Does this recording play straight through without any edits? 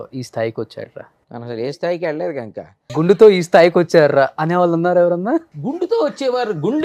no; 3 cuts; at 1.6 s, 2.8 s, 5.5 s

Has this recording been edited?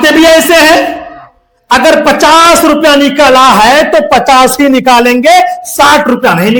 no; 0 cuts

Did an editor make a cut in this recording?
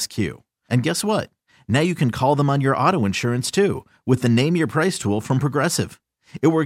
no; 0 cuts

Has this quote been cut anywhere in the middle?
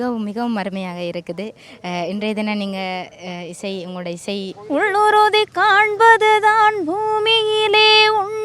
yes; 1 cut; at 4.6 s

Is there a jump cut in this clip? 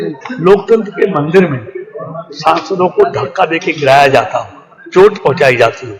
no; 0 cuts

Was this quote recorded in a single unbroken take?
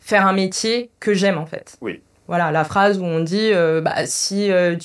yes; 0 cuts

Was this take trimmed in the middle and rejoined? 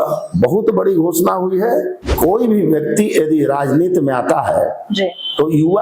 yes; 1 cut; at 2.0 s

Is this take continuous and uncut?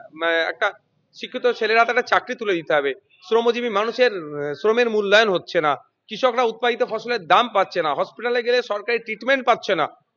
yes; 0 cuts

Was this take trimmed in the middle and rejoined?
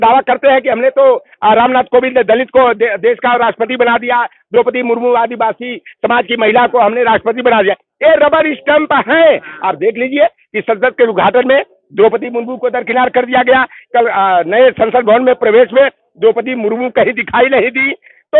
no; 0 cuts

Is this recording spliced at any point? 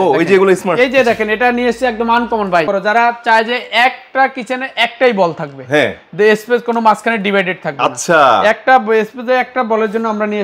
yes; 1 cut; at 2.7 s

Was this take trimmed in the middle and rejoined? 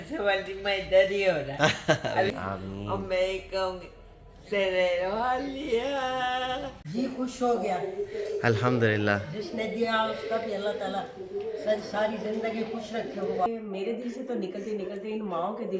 yes; 3 cuts; at 2.3 s, 6.8 s, 13.5 s

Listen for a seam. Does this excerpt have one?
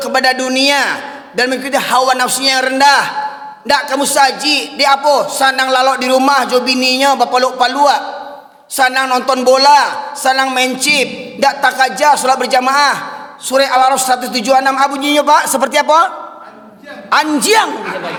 no; 0 cuts

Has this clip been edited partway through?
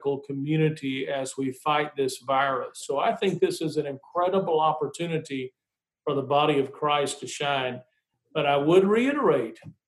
yes; 1 cut; at 2.8 s

